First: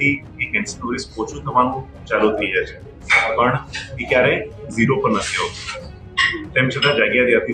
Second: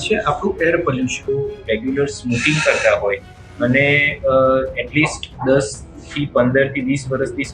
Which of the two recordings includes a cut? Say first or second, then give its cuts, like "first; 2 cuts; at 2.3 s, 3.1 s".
second; 1 cut; at 1.2 s